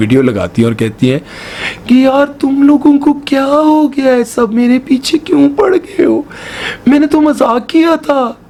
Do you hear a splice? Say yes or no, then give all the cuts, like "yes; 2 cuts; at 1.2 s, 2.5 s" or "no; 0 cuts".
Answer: no; 0 cuts